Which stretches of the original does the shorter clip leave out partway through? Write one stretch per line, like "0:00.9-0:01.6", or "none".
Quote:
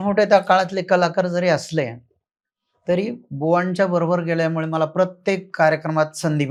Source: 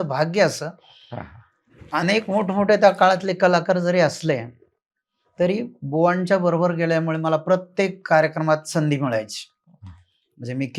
none